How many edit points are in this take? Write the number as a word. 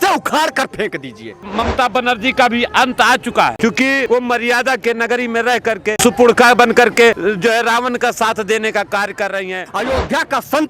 five